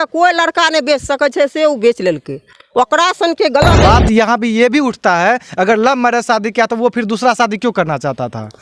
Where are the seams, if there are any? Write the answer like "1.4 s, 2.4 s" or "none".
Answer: 3.8 s